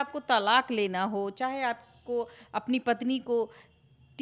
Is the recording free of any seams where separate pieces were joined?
yes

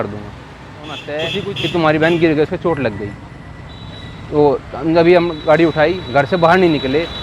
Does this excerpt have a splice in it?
yes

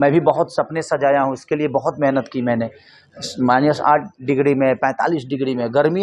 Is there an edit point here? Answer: no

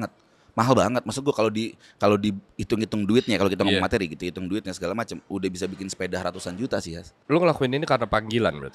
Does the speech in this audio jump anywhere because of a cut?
yes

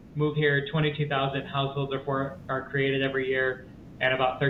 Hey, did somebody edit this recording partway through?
no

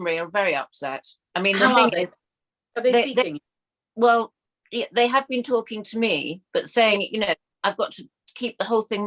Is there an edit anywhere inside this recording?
no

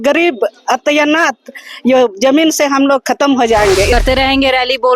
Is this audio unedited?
no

